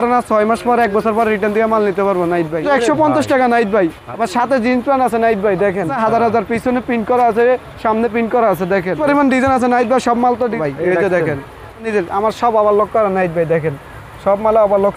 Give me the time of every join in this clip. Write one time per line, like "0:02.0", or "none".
0:02.6
0:04.1
0:05.9
0:09.0
0:10.6
0:11.9